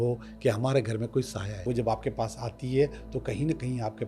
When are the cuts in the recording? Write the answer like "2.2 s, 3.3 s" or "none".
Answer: 1.7 s